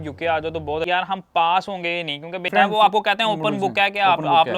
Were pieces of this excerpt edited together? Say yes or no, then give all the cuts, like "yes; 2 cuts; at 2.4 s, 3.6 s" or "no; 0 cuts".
yes; 2 cuts; at 0.9 s, 2.5 s